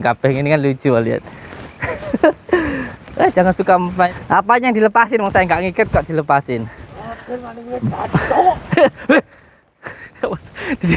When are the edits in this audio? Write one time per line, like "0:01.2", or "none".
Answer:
0:04.1